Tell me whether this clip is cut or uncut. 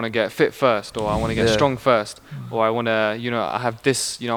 uncut